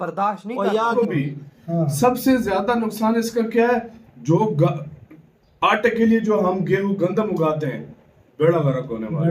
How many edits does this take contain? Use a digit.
1